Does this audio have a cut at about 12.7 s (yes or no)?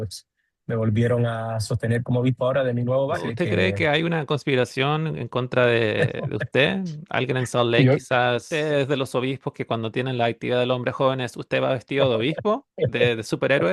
no